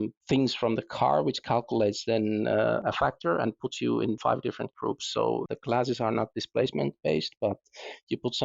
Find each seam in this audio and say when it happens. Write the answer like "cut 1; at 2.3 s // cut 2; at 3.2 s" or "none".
none